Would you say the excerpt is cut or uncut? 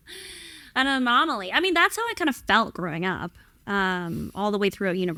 uncut